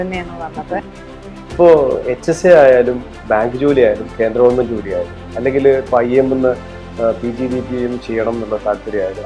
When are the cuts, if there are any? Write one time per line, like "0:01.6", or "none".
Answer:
0:00.9

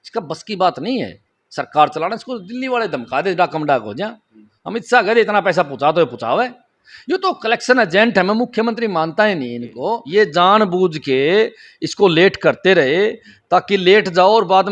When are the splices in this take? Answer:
0:10.0

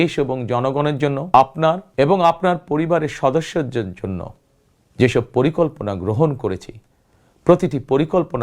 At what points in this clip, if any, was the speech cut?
0:01.3
0:01.9

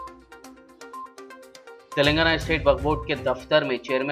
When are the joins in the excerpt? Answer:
none

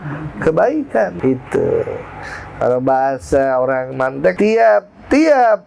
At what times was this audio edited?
0:01.1
0:04.3

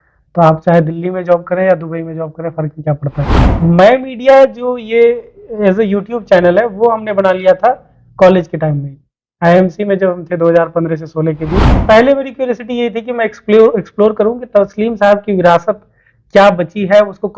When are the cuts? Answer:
0:03.6
0:11.7

